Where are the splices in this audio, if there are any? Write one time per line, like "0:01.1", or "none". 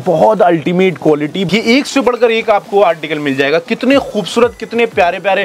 0:01.5